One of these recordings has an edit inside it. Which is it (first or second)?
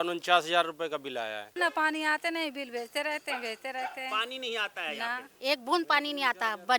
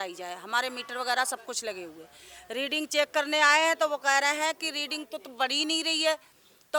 first